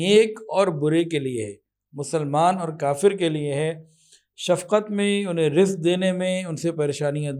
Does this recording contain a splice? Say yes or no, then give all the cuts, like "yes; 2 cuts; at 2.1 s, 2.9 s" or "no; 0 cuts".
no; 0 cuts